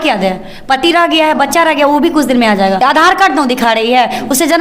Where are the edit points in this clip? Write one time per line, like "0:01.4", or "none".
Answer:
0:02.8